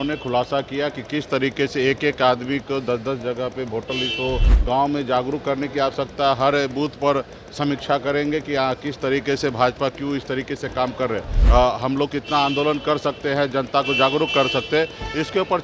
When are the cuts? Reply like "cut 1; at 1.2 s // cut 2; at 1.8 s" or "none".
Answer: cut 1; at 4.5 s // cut 2; at 11.3 s